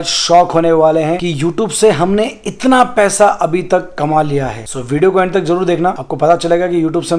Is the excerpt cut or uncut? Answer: uncut